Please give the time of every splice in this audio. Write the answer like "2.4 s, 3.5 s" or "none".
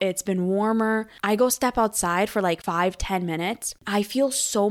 1.1 s, 2.6 s, 3.7 s